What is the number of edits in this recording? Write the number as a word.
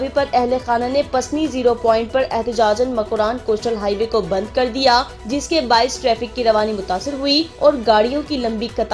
two